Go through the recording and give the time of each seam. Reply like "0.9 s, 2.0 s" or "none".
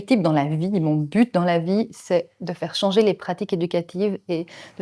none